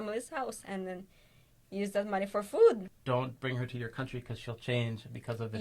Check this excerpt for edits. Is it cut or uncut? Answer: cut